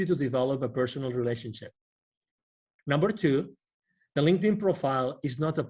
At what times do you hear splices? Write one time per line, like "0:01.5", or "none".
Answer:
0:02.7